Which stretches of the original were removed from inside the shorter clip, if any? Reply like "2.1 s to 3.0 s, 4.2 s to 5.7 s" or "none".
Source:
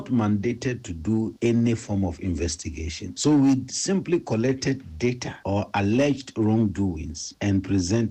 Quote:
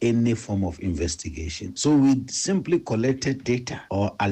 4.8 s to 4.9 s